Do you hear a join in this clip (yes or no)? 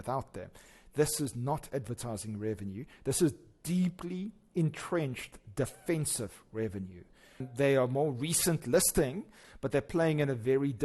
yes